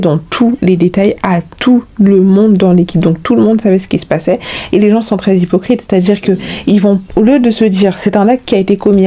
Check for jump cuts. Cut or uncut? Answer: uncut